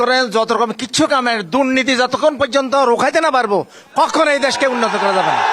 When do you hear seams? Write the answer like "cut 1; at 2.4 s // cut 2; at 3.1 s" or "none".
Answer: none